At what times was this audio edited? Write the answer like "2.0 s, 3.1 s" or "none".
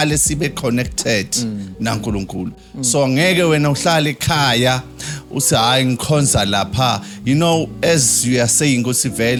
none